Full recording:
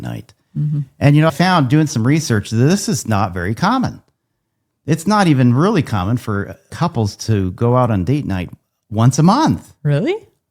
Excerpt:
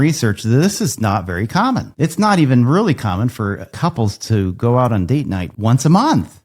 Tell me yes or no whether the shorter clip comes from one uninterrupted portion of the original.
no